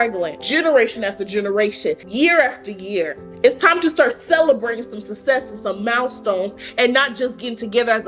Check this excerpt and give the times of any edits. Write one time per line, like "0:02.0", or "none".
0:02.0